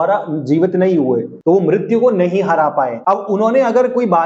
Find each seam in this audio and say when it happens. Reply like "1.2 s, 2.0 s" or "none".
1.3 s, 3.0 s

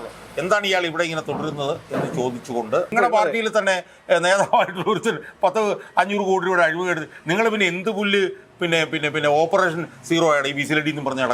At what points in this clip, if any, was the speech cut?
2.9 s

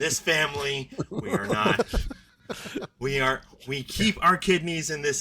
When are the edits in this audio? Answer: none

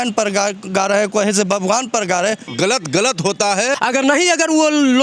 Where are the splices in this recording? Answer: 2.5 s, 3.8 s

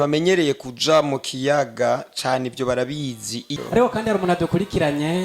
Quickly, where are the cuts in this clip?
3.5 s

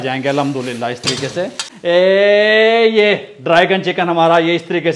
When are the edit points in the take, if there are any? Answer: 1.7 s

